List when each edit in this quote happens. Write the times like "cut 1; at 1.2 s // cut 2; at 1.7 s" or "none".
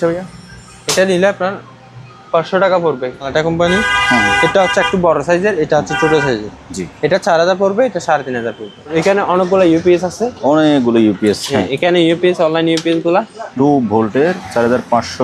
cut 1; at 3.3 s // cut 2; at 8.9 s // cut 3; at 13.4 s